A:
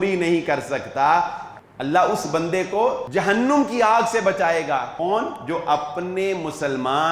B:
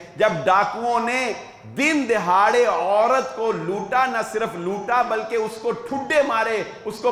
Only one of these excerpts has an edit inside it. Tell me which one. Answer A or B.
A